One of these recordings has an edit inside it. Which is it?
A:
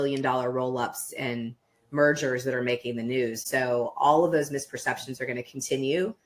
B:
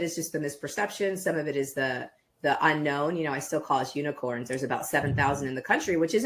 A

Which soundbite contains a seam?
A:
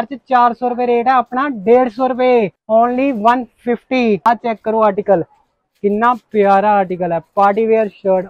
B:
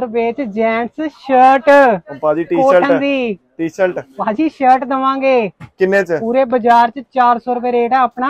A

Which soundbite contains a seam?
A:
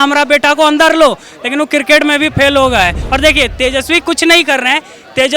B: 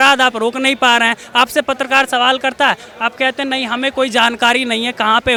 A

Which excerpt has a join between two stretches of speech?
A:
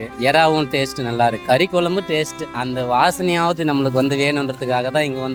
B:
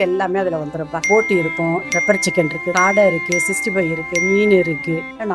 B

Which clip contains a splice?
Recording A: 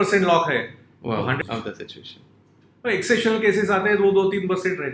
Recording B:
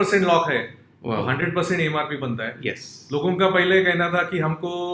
A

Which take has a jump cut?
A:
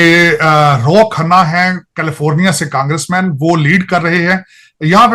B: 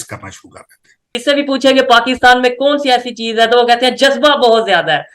B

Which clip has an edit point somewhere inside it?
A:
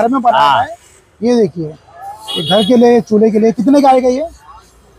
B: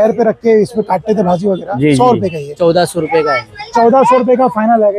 B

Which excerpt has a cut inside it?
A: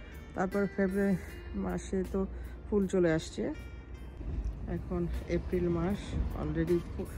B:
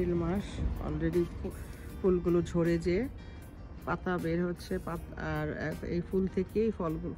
A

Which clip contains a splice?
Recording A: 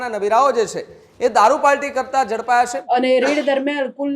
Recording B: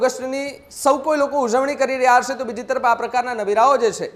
A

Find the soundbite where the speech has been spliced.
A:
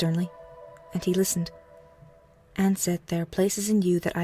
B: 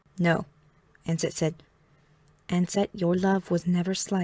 A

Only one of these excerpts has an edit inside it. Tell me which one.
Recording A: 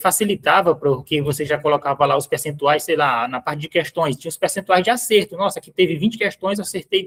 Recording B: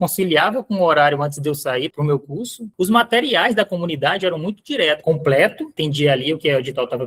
B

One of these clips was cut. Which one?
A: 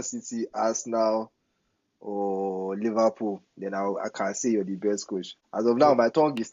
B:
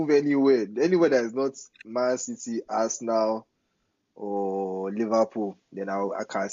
A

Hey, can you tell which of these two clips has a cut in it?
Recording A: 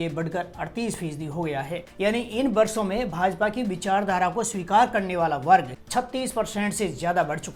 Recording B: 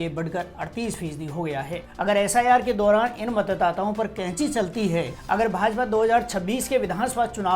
B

